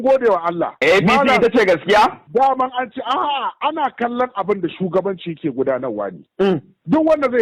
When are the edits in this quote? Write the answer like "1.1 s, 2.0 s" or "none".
2.2 s

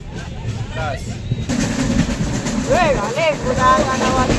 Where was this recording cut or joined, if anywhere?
1.5 s

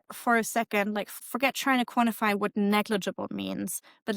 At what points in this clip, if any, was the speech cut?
1.2 s

